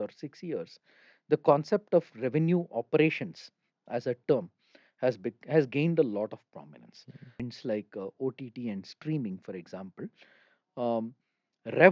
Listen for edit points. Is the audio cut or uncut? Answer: cut